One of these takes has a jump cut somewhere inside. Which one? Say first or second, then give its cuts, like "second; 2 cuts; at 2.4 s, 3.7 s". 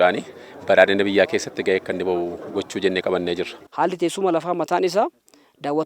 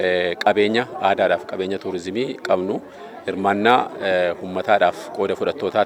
first; 1 cut; at 3.6 s